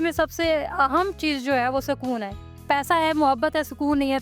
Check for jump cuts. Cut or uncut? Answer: cut